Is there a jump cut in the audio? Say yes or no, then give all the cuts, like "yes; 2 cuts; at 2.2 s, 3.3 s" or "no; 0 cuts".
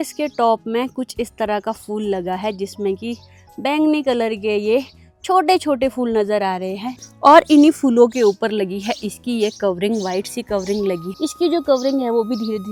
no; 0 cuts